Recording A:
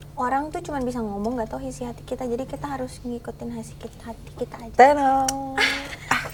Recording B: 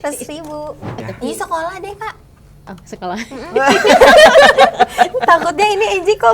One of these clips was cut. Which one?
B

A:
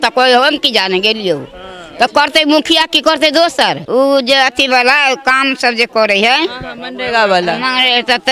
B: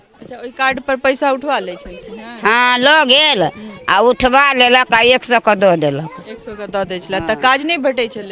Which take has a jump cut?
A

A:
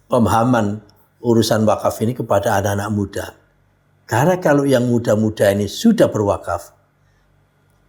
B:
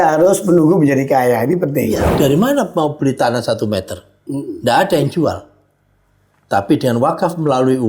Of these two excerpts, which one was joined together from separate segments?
B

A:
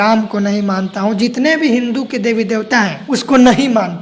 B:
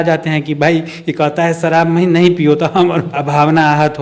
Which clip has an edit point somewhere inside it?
A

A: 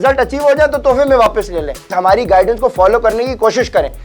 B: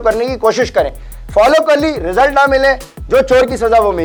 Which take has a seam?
A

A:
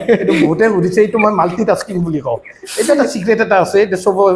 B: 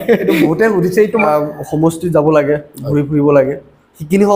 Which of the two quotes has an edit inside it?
B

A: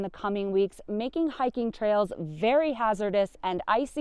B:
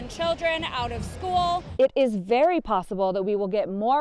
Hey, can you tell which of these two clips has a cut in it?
B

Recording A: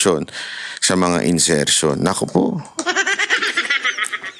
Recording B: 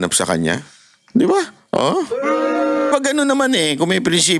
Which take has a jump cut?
B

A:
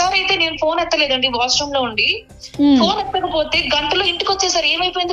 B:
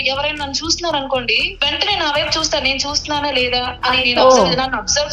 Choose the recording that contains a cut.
B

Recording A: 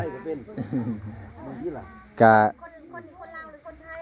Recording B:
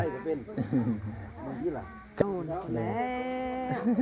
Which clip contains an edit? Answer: B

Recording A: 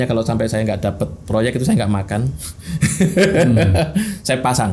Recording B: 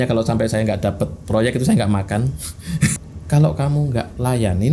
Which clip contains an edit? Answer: B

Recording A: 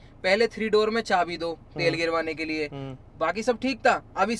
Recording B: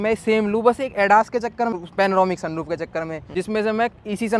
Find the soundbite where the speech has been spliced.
B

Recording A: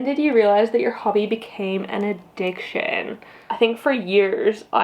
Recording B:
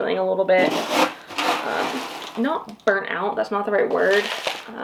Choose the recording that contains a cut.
A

